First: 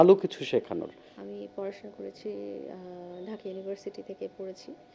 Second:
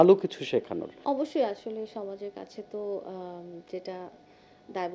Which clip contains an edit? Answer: first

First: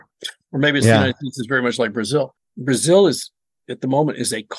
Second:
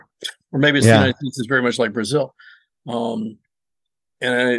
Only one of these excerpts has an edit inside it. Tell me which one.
first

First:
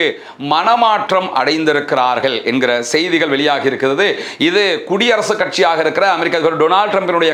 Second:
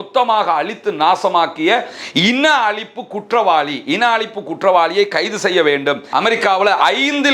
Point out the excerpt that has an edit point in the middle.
second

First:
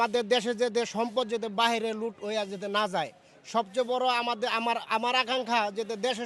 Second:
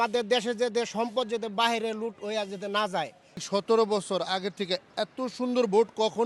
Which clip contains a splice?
second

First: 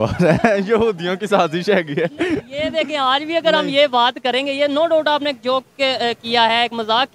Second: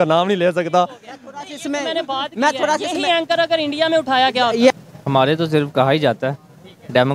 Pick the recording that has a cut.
second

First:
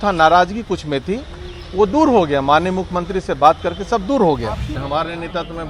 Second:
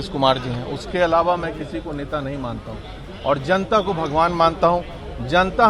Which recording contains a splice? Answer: first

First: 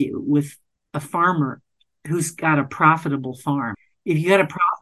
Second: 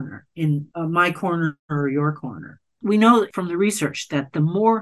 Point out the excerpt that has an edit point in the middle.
first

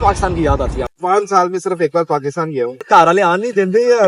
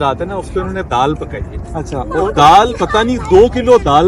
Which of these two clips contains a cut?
first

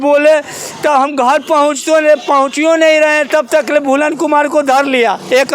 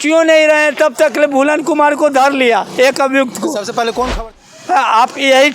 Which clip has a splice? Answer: second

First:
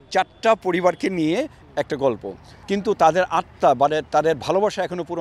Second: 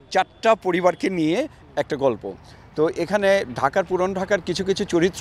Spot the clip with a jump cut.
first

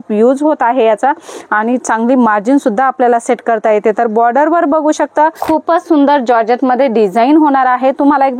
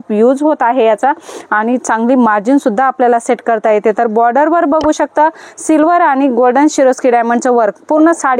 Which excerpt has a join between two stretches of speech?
first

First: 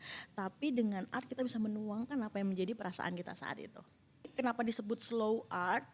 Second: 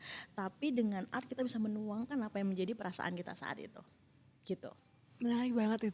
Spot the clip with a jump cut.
first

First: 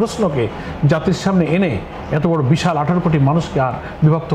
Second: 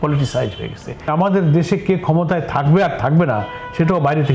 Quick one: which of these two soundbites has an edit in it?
second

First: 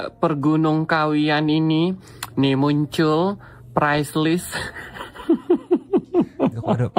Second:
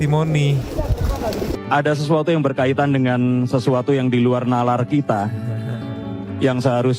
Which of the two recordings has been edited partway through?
second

